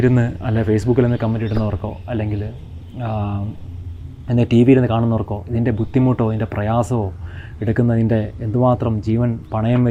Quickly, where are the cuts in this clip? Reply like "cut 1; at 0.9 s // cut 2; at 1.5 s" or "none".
none